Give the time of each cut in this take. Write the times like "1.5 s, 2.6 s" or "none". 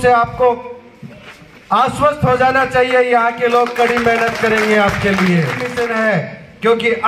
5.6 s